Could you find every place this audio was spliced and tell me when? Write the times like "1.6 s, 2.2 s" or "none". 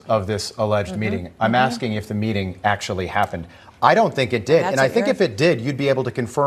none